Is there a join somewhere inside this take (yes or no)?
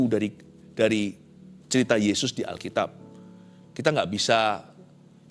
no